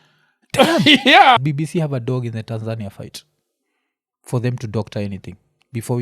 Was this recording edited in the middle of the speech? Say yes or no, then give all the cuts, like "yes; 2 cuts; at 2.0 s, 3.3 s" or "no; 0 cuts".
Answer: yes; 1 cut; at 1.4 s